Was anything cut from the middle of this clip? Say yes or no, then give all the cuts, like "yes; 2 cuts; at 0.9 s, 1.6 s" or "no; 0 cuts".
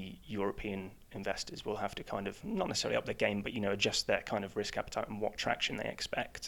no; 0 cuts